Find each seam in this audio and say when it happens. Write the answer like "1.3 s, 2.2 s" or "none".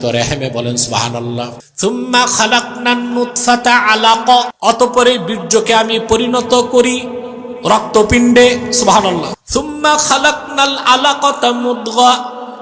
1.6 s, 4.5 s, 9.4 s